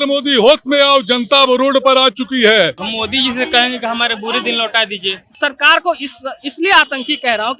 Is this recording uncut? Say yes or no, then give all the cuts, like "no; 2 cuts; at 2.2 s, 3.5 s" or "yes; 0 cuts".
no; 2 cuts; at 2.9 s, 5.3 s